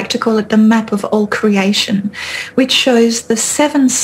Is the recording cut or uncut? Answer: uncut